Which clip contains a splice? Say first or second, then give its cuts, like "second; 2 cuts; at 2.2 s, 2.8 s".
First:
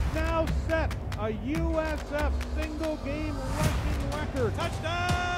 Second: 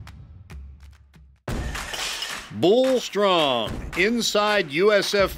second; 1 cut; at 1.3 s